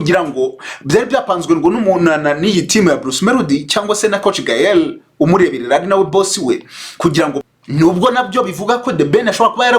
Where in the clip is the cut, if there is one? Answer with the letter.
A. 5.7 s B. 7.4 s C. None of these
B